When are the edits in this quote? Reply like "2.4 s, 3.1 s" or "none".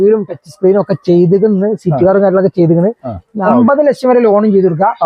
3.3 s